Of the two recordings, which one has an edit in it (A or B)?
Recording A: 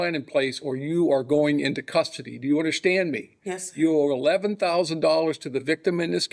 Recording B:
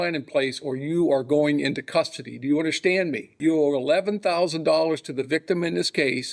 B